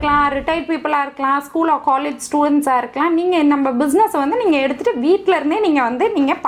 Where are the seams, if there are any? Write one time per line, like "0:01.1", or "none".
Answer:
none